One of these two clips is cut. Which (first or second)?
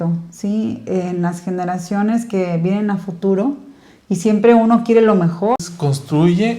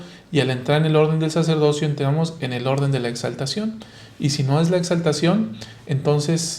first